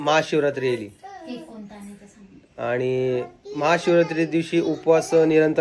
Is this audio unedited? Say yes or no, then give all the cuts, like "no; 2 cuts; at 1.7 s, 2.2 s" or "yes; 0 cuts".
yes; 0 cuts